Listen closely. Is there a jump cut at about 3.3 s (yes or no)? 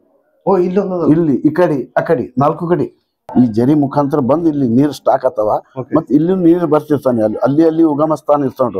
yes